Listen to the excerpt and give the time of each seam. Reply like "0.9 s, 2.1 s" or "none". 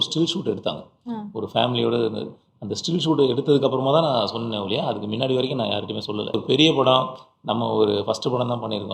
6.3 s